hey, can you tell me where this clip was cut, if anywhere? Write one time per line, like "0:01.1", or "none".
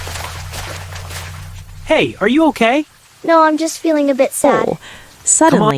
0:04.4